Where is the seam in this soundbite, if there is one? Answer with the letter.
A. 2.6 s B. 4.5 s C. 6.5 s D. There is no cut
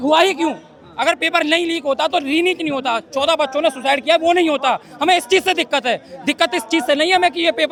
D